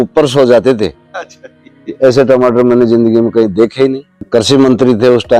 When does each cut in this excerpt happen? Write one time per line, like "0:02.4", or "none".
0:04.3